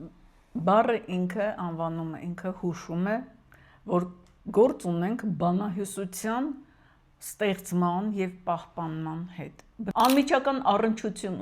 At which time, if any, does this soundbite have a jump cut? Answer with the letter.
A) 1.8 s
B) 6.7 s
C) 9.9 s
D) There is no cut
C